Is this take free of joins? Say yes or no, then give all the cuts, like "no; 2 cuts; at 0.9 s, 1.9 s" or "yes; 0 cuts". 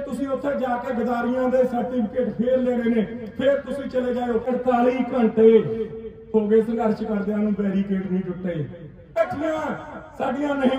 no; 2 cuts; at 4.5 s, 9.1 s